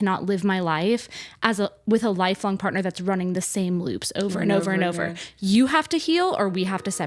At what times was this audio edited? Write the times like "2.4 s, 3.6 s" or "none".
none